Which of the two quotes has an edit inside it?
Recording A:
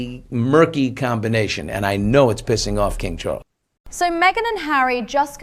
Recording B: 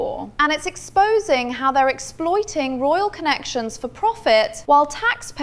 A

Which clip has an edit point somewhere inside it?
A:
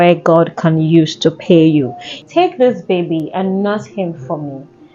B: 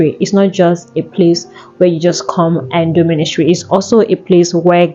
A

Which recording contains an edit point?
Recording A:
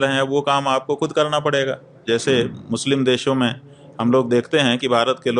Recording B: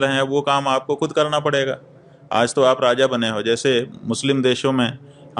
A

